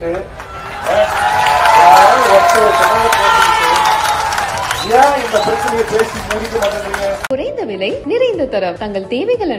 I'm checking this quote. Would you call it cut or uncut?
cut